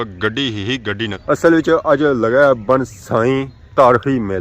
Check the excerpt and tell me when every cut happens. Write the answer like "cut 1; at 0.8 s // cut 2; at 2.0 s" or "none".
cut 1; at 1.2 s